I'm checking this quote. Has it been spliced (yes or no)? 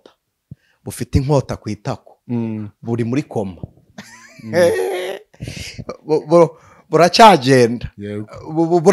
no